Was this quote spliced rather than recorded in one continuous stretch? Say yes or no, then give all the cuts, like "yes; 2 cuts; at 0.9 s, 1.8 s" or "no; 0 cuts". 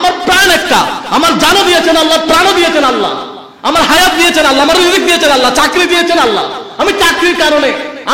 no; 0 cuts